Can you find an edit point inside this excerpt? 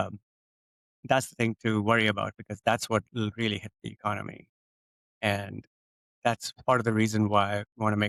no; 0 cuts

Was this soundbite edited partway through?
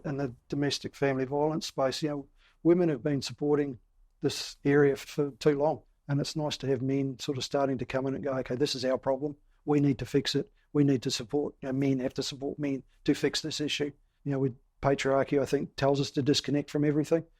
yes; 3 cuts; at 5.1 s, 5.9 s, 14.1 s

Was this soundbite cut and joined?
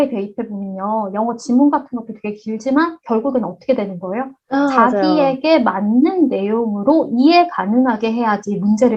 no; 0 cuts

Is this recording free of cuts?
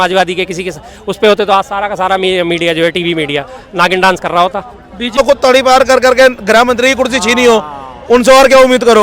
no; 1 cut; at 5.2 s

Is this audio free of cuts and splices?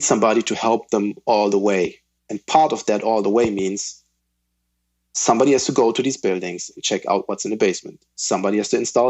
yes; 0 cuts

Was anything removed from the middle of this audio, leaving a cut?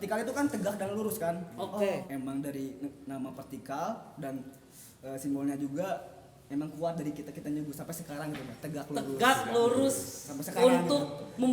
yes; 1 cut; at 2.0 s

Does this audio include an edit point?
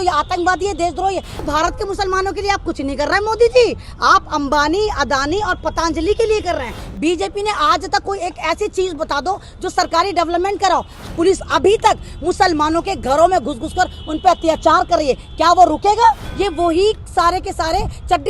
yes; 4 cuts; at 1.3 s, 6.8 s, 11.1 s, 16.3 s

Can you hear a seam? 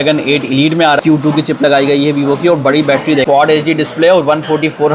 yes; 2 cuts; at 1.0 s, 3.2 s

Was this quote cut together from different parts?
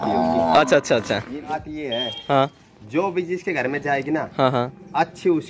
yes; 1 cut; at 1.5 s

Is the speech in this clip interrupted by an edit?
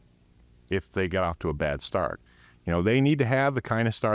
no; 0 cuts

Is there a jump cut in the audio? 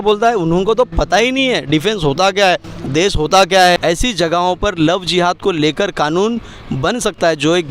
yes; 1 cut; at 3.8 s

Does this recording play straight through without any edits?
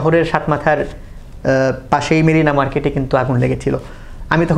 yes; 0 cuts

